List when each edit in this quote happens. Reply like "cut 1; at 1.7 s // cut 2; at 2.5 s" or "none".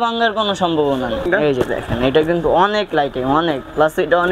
cut 1; at 1.2 s